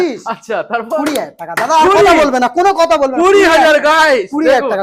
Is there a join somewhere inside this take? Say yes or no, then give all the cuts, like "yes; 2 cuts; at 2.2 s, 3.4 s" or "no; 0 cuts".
no; 0 cuts